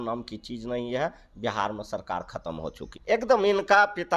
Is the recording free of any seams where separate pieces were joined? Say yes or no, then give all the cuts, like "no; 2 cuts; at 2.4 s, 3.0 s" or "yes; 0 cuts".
no; 1 cut; at 2.9 s